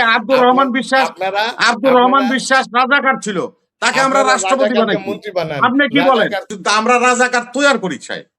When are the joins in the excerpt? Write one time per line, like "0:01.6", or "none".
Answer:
0:06.4